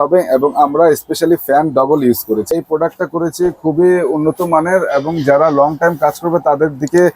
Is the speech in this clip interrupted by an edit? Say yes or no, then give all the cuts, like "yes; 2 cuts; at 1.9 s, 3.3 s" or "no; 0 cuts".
yes; 1 cut; at 2.5 s